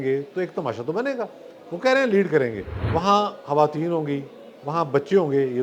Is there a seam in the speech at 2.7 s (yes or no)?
yes